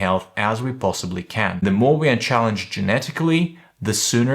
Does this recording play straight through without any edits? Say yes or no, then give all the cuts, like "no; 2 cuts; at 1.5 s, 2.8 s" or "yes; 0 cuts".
no; 1 cut; at 1.6 s